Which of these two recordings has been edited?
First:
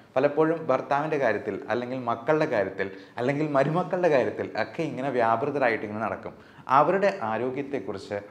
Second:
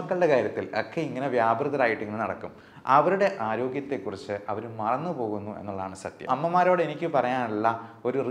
second; 1 cut; at 6.3 s

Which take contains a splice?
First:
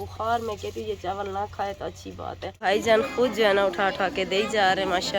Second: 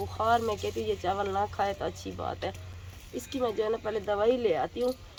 first; 1 cut; at 2.6 s

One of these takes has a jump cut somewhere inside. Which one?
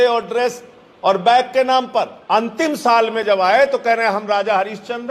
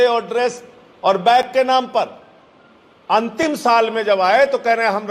first; 1 cut; at 2.2 s

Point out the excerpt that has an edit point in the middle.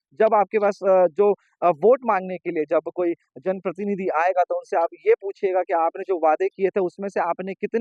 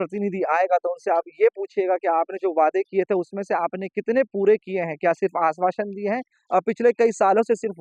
second; 1 cut; at 6.3 s

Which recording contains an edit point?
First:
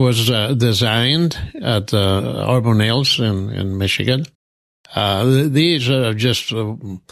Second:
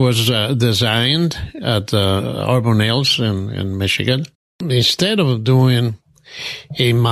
second; 1 cut; at 4.6 s

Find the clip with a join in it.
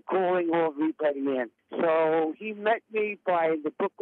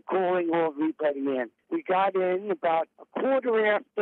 second; 1 cut; at 1.6 s

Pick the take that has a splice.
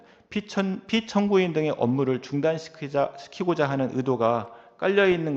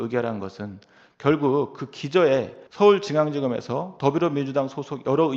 second; 1 cut; at 2.6 s

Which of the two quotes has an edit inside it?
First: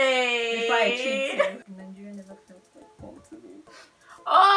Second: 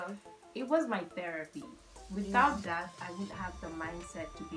first; 1 cut; at 1.6 s

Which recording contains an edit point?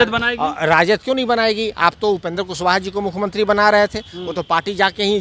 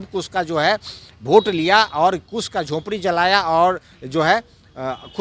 first; 1 cut; at 1.8 s

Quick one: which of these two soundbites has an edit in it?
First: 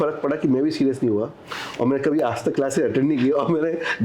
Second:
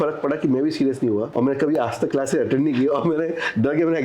second; 1 cut; at 1.3 s

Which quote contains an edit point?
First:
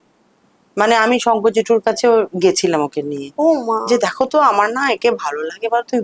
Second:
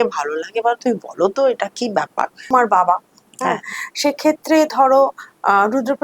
second; 1 cut; at 2.5 s

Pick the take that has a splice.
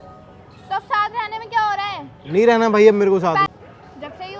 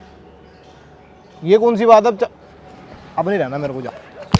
first; 1 cut; at 3.5 s

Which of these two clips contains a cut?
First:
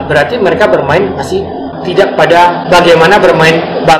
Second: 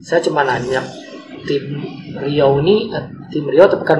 first; 2 cuts; at 1.7 s, 2.6 s

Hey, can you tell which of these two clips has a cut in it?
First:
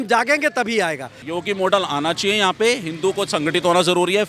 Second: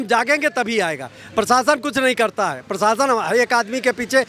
first; 1 cut; at 1.2 s

